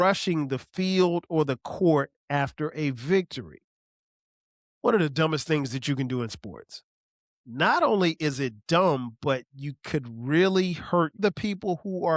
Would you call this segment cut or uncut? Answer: cut